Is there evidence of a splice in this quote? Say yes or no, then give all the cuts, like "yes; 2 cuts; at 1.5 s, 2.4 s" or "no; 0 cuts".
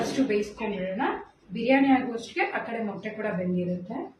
no; 0 cuts